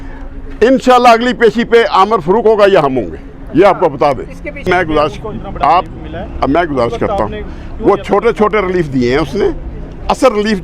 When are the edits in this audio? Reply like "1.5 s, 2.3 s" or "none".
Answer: 4.6 s